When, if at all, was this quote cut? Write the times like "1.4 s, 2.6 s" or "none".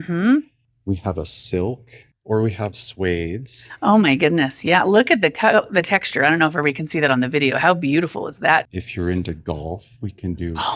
2.1 s, 8.7 s